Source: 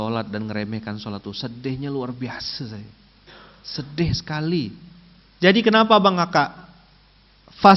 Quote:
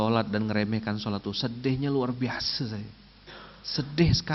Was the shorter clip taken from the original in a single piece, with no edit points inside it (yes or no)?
yes